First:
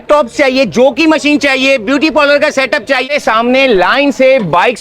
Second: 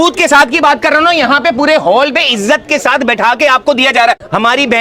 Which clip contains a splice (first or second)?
first